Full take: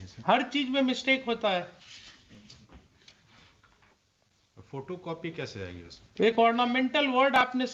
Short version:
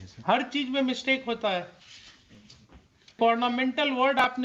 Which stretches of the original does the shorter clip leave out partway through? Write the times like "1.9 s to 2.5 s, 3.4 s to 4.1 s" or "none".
3.2 s to 6.3 s